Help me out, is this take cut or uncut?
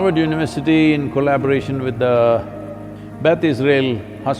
uncut